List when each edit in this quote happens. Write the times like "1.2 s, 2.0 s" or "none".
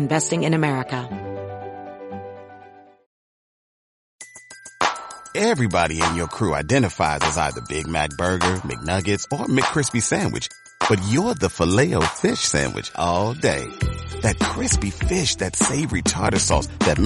1.0 s